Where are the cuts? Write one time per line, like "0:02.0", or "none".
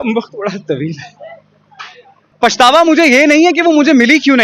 0:02.3